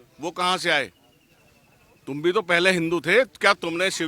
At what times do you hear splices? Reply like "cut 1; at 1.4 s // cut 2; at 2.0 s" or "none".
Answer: none